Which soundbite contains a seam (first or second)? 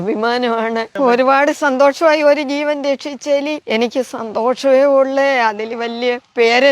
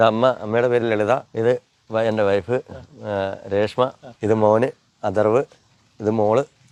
first